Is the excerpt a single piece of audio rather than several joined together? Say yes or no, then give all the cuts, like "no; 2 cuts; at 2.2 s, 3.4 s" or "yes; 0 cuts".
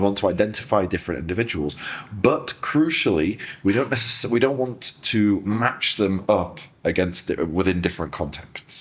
yes; 0 cuts